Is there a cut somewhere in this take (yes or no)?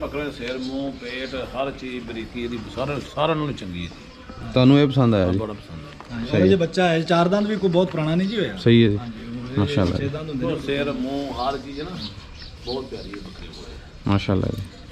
no